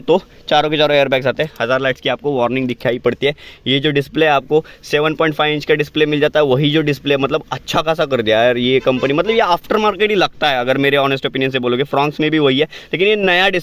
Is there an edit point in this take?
no; 0 cuts

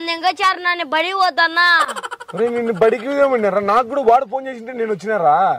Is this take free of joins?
yes; 0 cuts

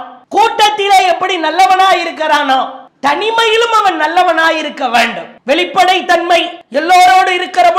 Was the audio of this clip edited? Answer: yes; 2 cuts; at 5.3 s, 6.6 s

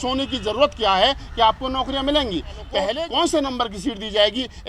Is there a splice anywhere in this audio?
yes; 1 cut; at 2.9 s

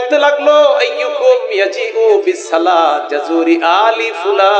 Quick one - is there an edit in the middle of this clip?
no; 0 cuts

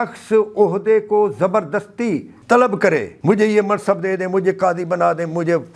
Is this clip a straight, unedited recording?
no; 2 cuts; at 2.3 s, 3.1 s

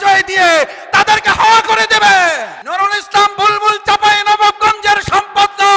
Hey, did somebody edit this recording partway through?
yes; 1 cut; at 2.5 s

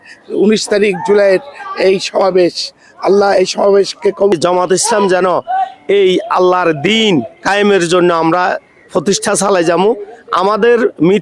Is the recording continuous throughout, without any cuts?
no; 1 cut; at 4.3 s

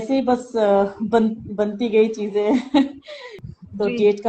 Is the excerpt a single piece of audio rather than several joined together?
no; 1 cut; at 3.3 s

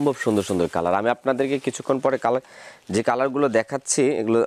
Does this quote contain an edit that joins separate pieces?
no; 0 cuts

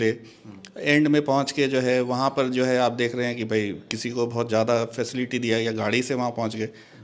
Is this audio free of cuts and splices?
yes; 0 cuts

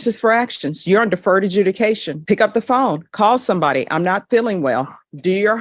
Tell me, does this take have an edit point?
no; 0 cuts

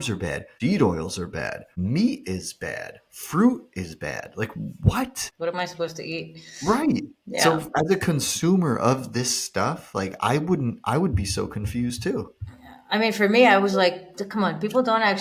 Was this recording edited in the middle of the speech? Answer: no; 0 cuts

